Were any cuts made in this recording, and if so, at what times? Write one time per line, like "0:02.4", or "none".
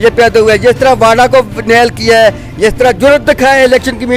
none